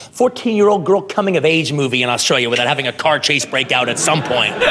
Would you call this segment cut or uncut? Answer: uncut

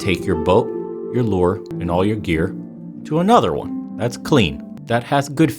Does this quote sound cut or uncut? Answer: cut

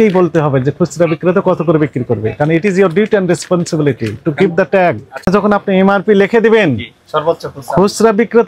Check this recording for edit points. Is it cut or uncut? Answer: cut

